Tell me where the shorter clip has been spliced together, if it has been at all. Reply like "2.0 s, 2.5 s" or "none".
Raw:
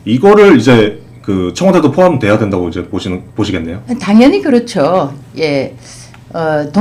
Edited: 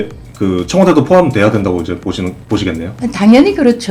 none